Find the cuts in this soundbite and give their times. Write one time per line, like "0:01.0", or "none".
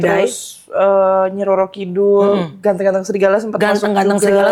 none